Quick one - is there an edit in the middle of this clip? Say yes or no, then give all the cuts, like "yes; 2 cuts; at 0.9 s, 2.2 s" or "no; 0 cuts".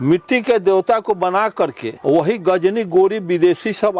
yes; 1 cut; at 1.9 s